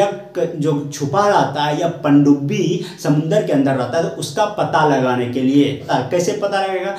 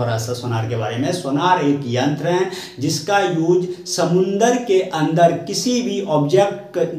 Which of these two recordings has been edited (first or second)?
first